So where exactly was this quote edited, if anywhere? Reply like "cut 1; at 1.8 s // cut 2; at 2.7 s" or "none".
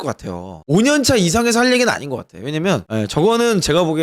cut 1; at 2.8 s